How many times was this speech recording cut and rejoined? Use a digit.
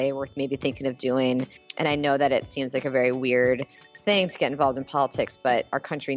1